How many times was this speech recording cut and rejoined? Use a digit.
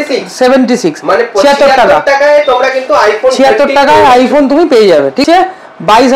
1